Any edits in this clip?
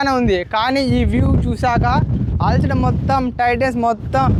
no; 0 cuts

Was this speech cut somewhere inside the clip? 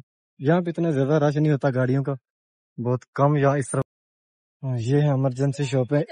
yes; 1 cut; at 3.8 s

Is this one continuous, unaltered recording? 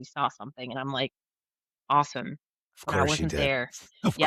yes; 0 cuts

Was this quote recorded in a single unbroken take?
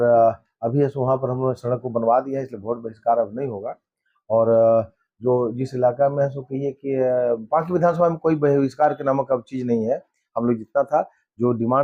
yes; 0 cuts

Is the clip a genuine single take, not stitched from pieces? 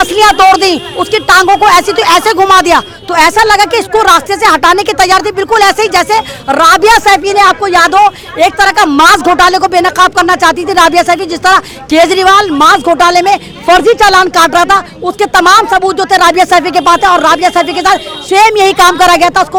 yes; 0 cuts

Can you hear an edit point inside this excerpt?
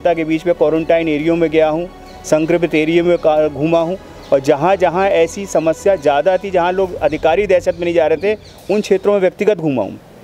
no; 0 cuts

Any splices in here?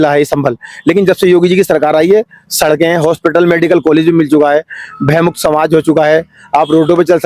no; 0 cuts

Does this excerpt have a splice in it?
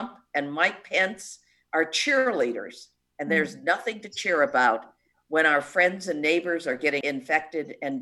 yes; 1 cut; at 7.0 s

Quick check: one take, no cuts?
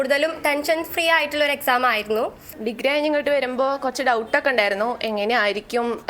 no; 1 cut; at 2.6 s

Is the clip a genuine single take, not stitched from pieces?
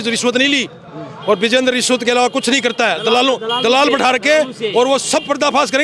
yes; 0 cuts

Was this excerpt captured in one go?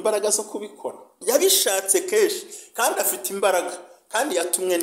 no; 1 cut; at 1.2 s

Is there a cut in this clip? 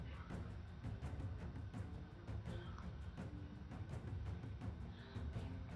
no; 0 cuts

